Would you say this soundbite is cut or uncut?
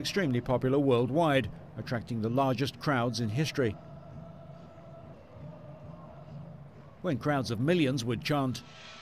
cut